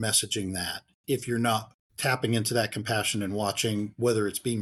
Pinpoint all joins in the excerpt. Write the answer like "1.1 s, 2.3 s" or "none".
none